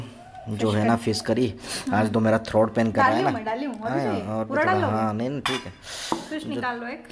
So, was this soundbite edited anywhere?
no; 0 cuts

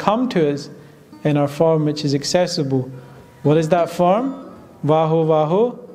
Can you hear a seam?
no; 0 cuts

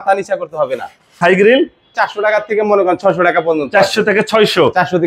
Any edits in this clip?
yes; 2 cuts; at 1.2 s, 1.9 s

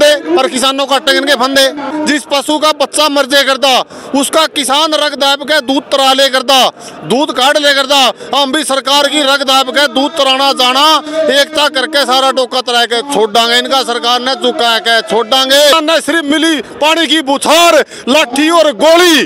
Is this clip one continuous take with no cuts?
no; 2 cuts; at 1.9 s, 15.8 s

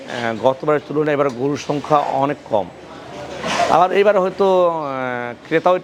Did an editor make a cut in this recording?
no; 0 cuts

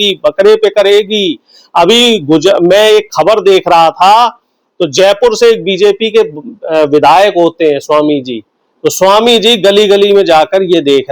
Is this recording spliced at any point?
no; 0 cuts

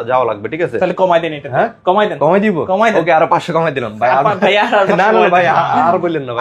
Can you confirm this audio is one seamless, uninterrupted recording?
yes; 0 cuts

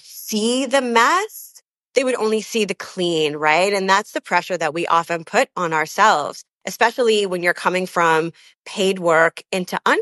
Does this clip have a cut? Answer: yes; 1 cut; at 6.6 s

